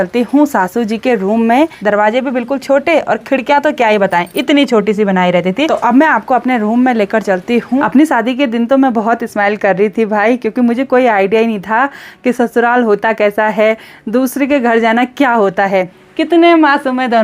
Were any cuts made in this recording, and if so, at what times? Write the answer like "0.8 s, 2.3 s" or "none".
1.8 s, 5.7 s, 7.8 s, 16.0 s